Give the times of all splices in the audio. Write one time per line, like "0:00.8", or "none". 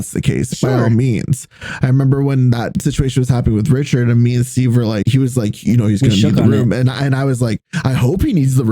0:02.7
0:05.0